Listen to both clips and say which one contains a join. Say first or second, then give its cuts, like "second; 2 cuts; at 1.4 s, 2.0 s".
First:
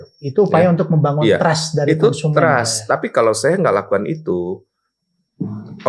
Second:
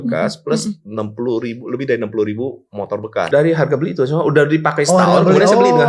second; 1 cut; at 3.3 s